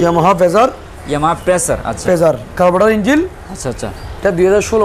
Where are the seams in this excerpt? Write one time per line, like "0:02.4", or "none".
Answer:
none